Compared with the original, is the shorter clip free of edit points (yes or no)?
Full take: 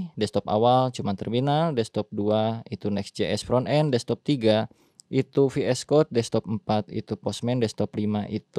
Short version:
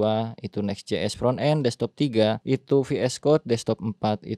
no